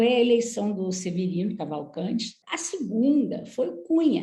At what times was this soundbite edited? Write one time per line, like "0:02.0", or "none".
0:02.4